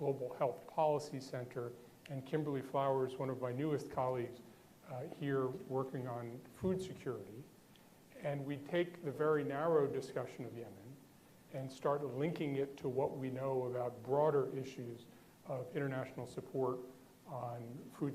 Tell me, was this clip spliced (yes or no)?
yes